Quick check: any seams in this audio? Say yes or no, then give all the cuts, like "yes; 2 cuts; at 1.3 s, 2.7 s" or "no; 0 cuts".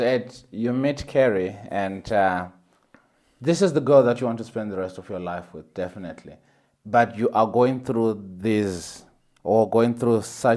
no; 0 cuts